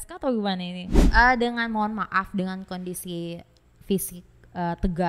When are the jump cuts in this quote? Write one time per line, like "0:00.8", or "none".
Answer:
0:01.0